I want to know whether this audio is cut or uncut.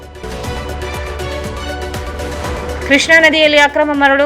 uncut